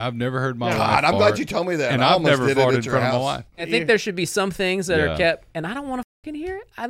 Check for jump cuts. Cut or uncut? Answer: cut